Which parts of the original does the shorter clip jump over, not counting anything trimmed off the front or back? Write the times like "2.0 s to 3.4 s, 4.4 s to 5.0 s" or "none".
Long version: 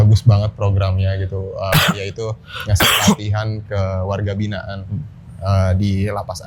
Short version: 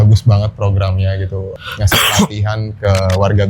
1.5 s to 2.4 s